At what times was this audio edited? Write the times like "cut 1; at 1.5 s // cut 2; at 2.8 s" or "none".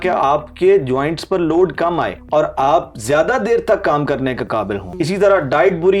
cut 1; at 2.2 s // cut 2; at 4.9 s